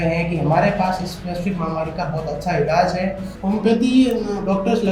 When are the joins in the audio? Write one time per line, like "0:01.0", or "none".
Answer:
0:03.3